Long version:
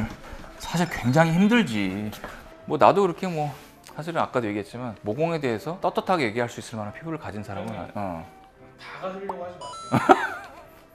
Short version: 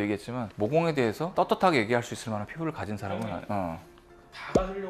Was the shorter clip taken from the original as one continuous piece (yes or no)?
yes